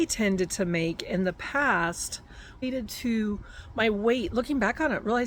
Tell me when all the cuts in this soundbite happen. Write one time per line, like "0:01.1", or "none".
0:02.6